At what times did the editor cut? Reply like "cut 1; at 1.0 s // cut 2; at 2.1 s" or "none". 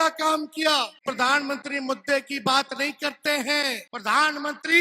cut 1; at 1.0 s // cut 2; at 3.9 s